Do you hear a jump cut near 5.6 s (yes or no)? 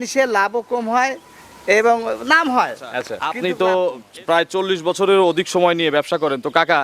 no